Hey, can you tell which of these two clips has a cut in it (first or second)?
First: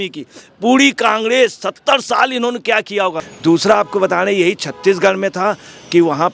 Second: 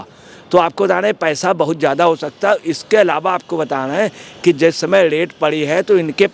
first